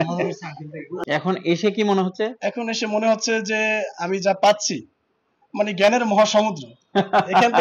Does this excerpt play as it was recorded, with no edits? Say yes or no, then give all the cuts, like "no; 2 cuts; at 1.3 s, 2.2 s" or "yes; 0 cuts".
no; 1 cut; at 0.9 s